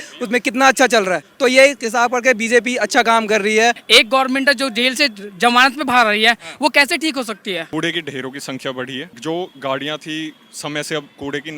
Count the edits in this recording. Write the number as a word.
three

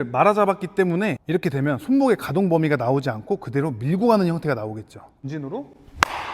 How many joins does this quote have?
two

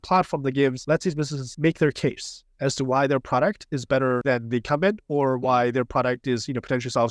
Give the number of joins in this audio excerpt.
two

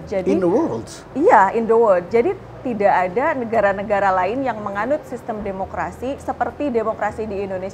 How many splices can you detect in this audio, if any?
zero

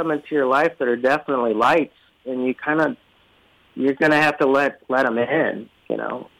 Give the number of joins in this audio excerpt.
zero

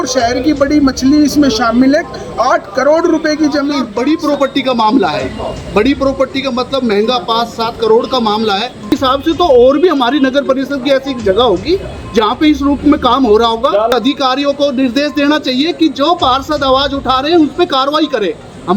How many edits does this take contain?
three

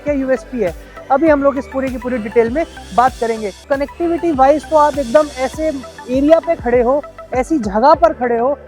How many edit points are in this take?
one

